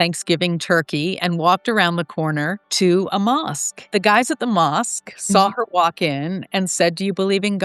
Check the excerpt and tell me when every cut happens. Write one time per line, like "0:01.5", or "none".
0:02.6
0:03.8